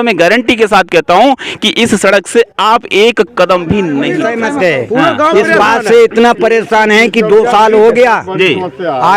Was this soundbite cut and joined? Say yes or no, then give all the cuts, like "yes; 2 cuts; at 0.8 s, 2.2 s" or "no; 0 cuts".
yes; 1 cut; at 4.1 s